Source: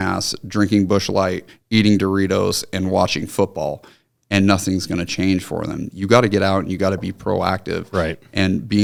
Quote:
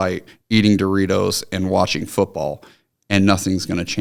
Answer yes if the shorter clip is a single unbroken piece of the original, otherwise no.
yes